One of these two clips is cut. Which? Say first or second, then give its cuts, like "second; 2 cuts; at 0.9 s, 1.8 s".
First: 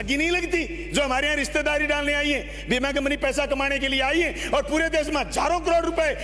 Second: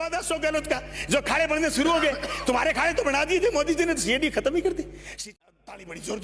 second; 1 cut; at 5.2 s